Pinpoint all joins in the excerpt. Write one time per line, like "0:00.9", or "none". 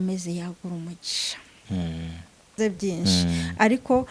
0:02.5